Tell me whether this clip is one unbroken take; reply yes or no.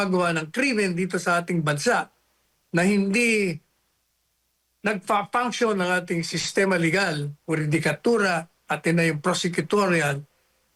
yes